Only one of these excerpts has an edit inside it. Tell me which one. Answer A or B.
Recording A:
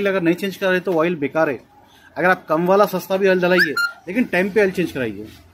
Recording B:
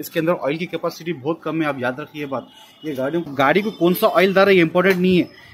B